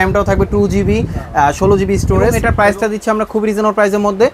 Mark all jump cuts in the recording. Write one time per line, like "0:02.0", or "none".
0:02.4

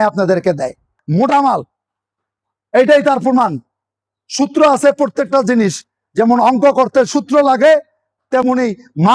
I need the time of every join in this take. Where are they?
0:01.0

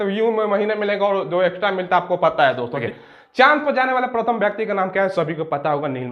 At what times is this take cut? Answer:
0:02.9

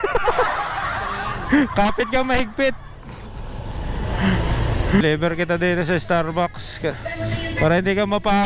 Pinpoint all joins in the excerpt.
0:05.0

